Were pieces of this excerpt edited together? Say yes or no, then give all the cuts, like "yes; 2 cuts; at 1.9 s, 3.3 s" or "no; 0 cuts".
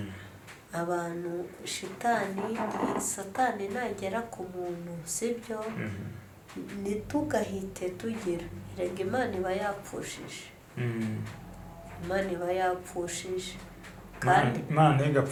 no; 0 cuts